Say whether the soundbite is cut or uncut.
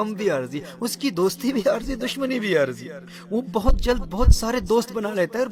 uncut